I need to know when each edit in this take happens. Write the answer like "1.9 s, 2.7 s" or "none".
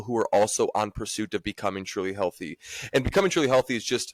none